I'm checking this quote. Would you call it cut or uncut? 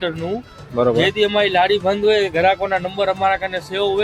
uncut